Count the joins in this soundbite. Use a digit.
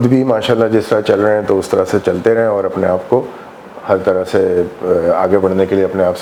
0